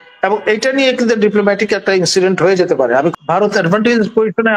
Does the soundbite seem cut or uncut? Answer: cut